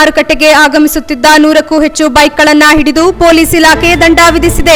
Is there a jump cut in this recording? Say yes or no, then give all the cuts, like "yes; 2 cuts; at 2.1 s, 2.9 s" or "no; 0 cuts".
no; 0 cuts